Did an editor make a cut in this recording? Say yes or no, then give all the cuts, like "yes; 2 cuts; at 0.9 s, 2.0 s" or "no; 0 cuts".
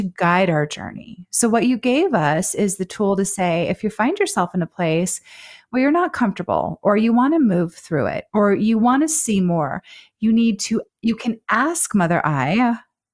no; 0 cuts